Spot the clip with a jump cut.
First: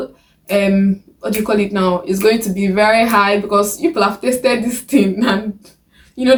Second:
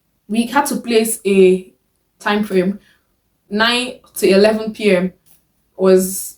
second; 1 cut; at 3.4 s

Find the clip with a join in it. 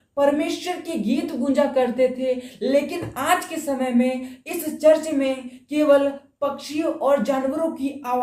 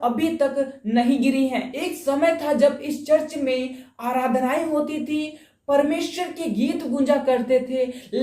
second; 1 cut; at 1.7 s

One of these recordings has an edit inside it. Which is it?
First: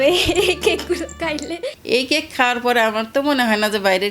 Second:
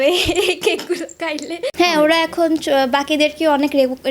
first; 1 cut; at 1.6 s

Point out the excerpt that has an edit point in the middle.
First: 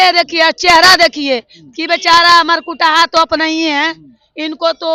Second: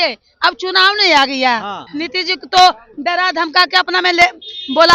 second; 1 cut; at 1.9 s

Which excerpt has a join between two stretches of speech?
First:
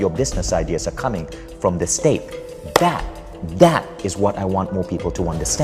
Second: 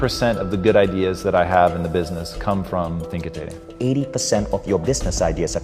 second; 1 cut; at 3.7 s

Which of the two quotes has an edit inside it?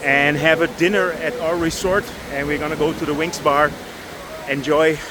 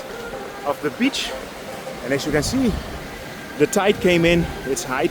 second; 1 cut; at 1.7 s

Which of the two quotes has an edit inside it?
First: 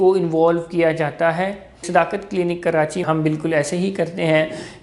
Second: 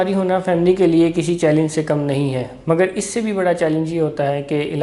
first; 2 cuts; at 1.8 s, 3.0 s

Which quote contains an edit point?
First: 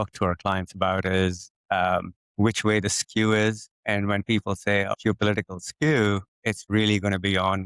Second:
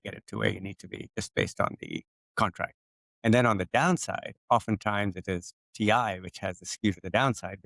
first; 4 cuts; at 2.2 s, 3.7 s, 4.9 s, 6.3 s

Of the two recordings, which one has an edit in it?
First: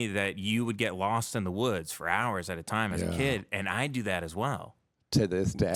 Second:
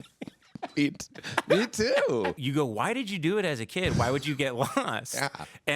second; 1 cut; at 2.4 s

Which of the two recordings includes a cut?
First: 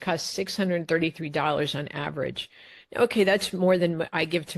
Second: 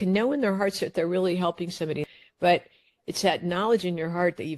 second; 1 cut; at 2.0 s

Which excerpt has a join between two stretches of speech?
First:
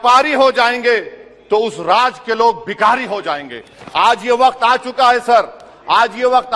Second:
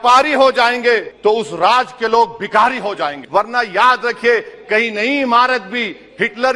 second; 2 cuts; at 1.1 s, 3.2 s

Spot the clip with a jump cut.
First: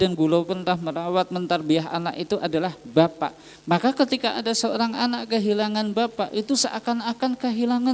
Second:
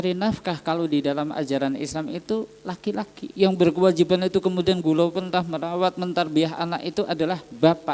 second; 1 cut; at 3.2 s

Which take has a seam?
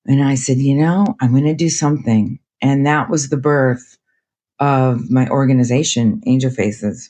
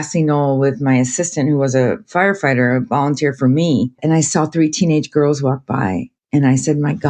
second; 2 cuts; at 4.0 s, 6.1 s

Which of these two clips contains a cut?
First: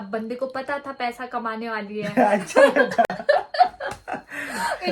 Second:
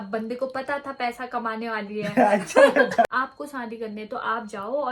second; 1 cut; at 3.1 s

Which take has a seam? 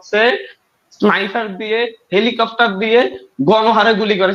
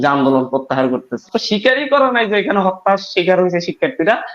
second; 1 cut; at 1.3 s

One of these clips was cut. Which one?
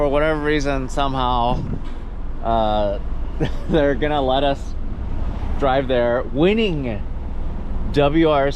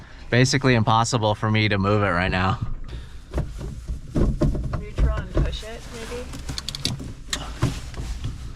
second; 1 cut; at 2.9 s

